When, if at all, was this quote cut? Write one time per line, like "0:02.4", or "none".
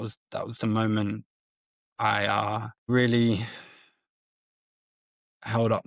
0:02.9

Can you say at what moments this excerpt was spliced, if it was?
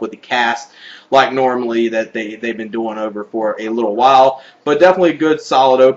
none

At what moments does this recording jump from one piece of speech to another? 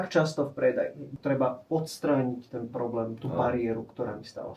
0:01.1

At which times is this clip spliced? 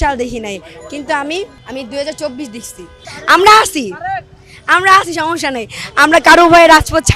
0:01.6

